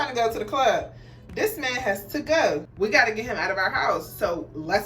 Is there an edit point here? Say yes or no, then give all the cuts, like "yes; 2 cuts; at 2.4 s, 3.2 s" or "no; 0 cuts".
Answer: yes; 1 cut; at 2.7 s